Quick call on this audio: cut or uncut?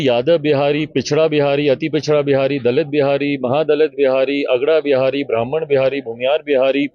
uncut